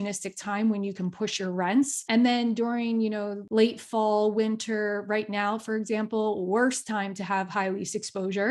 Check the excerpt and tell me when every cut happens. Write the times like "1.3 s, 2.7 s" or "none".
2.0 s, 3.4 s